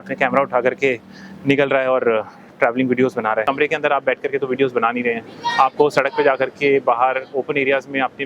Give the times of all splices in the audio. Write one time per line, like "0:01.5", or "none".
0:03.4